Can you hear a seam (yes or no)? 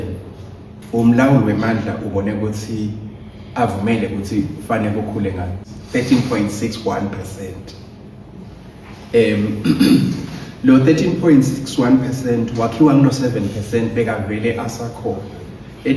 yes